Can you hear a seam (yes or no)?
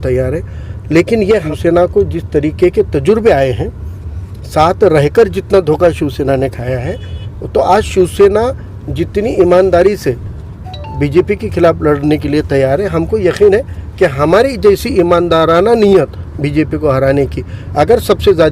yes